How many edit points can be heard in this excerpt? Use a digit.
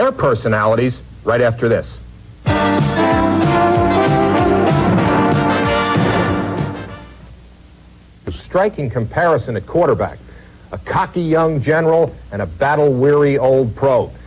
1